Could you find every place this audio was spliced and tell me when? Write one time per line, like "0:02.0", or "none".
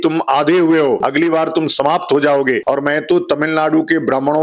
0:01.0
0:02.6